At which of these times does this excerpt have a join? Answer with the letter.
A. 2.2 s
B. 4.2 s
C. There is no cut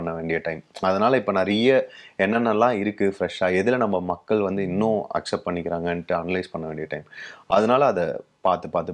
C